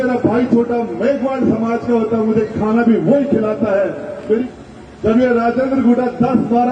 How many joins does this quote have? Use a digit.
1